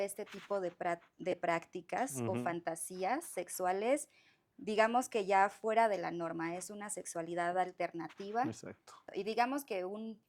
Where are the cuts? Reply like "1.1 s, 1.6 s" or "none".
9.1 s